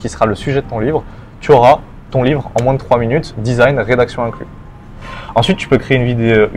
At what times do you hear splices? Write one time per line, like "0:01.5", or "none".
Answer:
none